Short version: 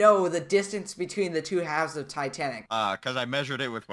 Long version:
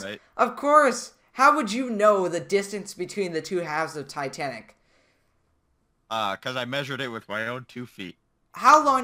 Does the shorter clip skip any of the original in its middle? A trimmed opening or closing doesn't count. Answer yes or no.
yes